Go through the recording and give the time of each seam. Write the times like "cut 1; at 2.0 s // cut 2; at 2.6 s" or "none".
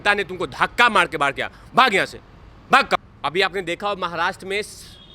cut 1; at 3.0 s